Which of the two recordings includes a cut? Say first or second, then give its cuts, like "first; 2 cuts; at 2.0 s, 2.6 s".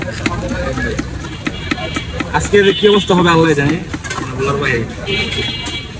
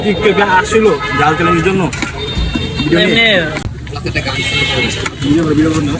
second; 1 cut; at 3.6 s